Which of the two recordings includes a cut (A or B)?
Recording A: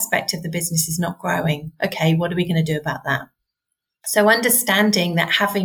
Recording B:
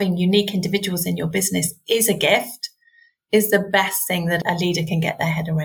B